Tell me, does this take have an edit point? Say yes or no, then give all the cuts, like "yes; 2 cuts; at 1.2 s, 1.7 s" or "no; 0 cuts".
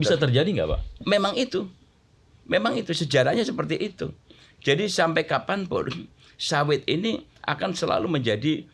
no; 0 cuts